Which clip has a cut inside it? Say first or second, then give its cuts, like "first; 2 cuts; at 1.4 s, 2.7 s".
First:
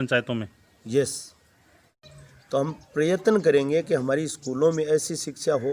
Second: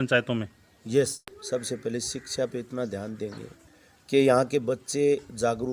first; 1 cut; at 1.8 s